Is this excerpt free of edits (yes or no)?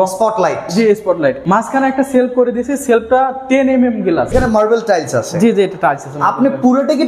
no